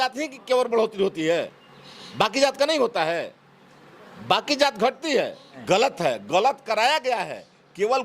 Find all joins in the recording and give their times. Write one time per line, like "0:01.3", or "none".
0:05.5

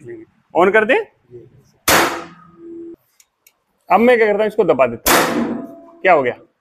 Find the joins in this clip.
0:03.0

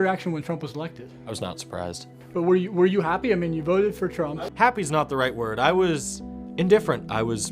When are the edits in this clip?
0:04.4

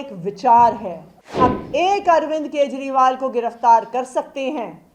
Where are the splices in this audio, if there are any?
0:01.4

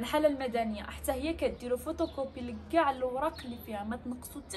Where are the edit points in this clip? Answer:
none

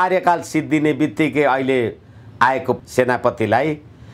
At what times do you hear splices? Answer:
none

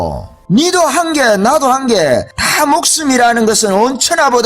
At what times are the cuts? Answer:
0:02.4

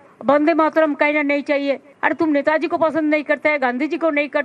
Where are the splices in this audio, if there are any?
0:01.9

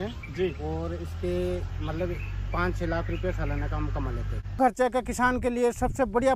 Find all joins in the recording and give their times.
0:04.6

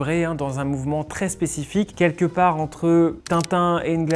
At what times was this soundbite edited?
0:01.9
0:03.2

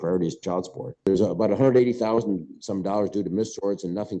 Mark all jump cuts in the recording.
0:01.0

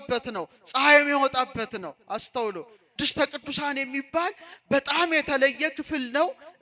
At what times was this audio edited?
0:02.8

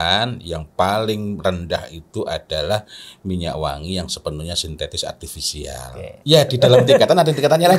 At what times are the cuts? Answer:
0:06.1

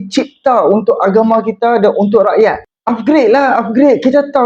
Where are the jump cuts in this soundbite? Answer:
0:02.7

